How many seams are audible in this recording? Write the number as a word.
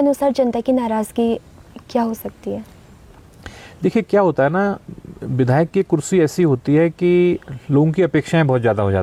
zero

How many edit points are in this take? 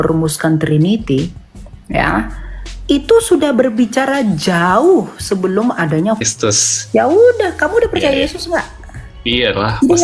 one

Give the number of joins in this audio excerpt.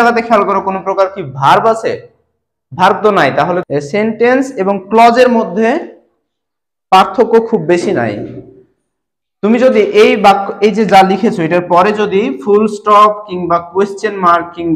one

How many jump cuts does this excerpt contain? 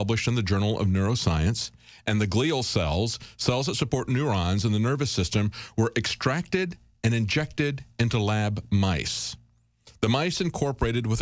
zero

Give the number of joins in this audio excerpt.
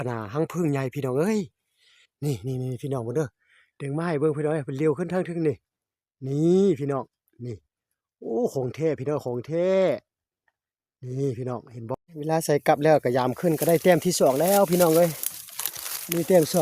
one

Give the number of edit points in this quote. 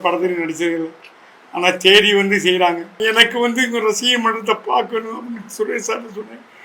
one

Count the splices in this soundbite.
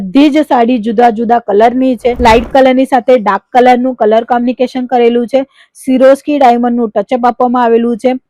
one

